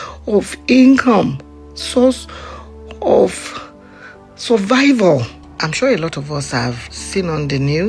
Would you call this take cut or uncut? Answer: cut